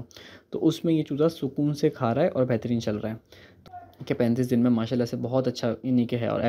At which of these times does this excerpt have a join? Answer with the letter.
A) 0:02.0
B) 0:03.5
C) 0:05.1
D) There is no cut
B